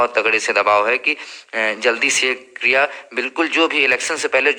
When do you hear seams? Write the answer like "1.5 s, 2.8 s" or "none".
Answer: none